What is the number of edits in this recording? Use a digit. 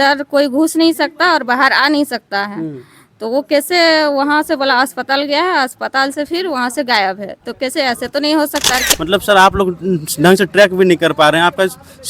1